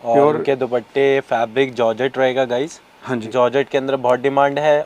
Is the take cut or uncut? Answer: uncut